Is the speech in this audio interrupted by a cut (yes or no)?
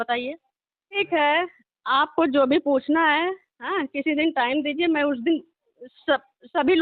yes